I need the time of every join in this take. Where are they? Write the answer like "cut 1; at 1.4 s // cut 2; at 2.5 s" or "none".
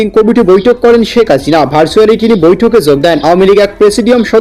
cut 1; at 3.4 s